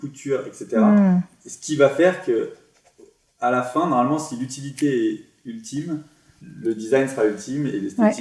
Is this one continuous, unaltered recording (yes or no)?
yes